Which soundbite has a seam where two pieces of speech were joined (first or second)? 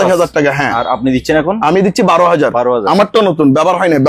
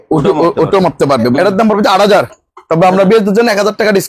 second